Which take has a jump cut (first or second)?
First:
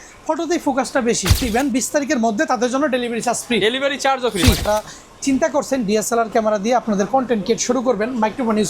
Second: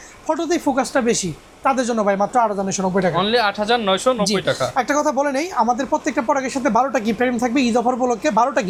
first